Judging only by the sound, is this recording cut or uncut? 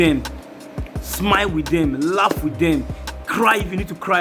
uncut